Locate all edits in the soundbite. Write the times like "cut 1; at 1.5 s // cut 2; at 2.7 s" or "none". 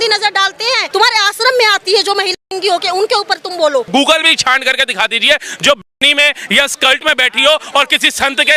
cut 1; at 0.9 s // cut 2; at 3.9 s